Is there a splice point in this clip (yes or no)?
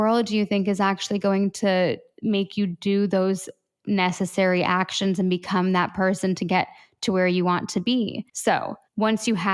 yes